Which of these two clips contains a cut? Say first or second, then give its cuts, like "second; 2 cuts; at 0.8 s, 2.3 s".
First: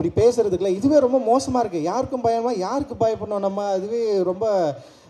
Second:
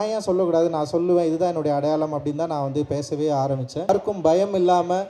second; 1 cut; at 3.9 s